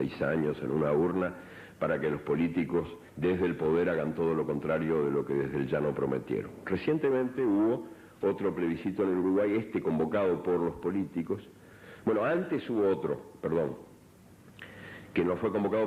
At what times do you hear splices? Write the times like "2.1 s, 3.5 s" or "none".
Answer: none